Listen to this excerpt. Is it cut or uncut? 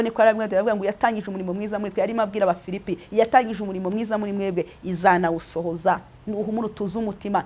uncut